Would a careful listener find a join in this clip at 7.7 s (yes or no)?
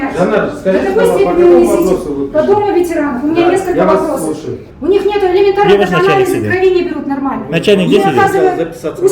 no